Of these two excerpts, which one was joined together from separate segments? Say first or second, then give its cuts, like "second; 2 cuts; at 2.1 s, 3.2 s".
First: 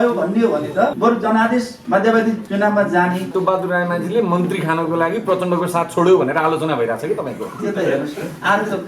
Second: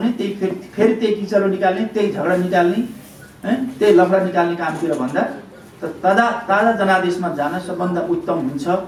first; 4 cuts; at 0.9 s, 1.8 s, 2.4 s, 3.3 s